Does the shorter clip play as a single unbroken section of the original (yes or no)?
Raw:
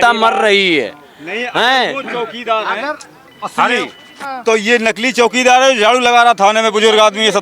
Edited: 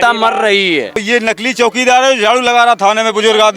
no